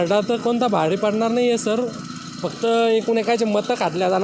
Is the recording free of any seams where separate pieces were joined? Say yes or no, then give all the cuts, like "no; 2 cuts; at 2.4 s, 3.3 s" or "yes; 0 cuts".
yes; 0 cuts